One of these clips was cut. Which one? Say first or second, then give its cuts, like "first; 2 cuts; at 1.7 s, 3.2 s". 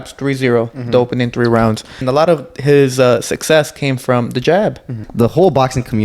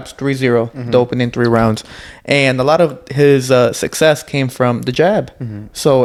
first; 2 cuts; at 2.0 s, 5.0 s